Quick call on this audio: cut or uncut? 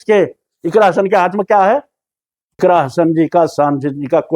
cut